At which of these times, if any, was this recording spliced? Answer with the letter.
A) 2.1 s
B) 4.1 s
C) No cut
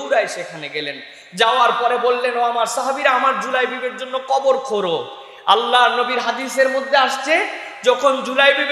C